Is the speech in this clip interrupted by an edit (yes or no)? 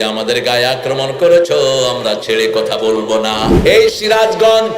yes